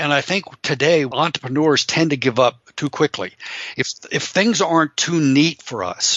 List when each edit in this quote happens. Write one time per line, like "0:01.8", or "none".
0:01.1